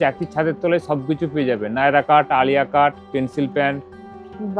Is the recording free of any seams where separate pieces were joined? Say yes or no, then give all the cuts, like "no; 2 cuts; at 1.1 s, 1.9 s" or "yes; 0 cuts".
yes; 0 cuts